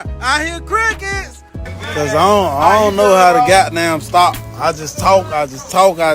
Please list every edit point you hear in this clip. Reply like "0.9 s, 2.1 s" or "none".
1.6 s